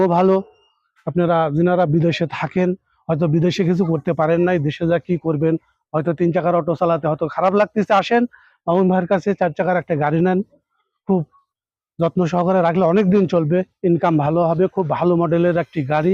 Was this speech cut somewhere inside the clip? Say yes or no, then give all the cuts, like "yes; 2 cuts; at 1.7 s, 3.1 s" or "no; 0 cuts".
no; 0 cuts